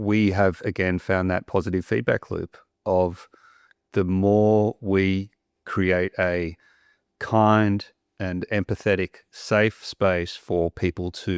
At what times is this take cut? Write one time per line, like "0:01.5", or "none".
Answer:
0:05.7